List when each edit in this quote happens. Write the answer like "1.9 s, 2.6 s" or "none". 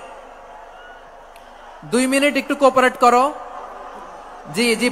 none